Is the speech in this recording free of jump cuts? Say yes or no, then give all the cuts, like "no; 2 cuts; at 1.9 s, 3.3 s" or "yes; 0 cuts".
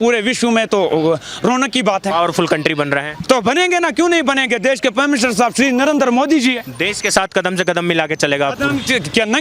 yes; 0 cuts